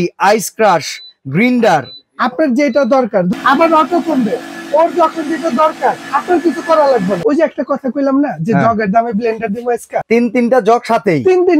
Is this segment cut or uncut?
cut